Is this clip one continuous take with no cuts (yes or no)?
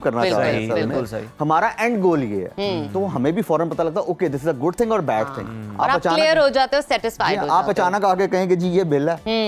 yes